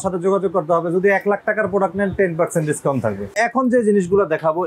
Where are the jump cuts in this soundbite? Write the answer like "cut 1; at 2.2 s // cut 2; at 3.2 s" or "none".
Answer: cut 1; at 3.4 s